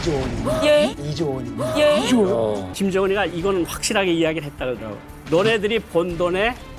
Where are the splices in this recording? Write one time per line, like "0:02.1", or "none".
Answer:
0:02.7